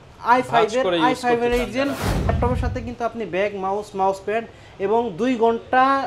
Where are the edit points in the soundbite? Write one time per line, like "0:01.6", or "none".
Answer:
0:02.3